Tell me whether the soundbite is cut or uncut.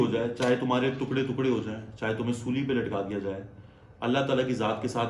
uncut